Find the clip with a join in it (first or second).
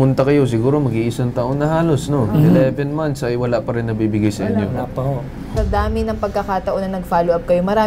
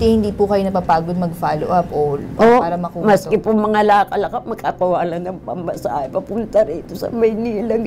first